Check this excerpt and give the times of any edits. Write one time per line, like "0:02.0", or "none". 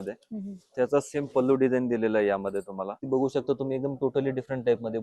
0:03.0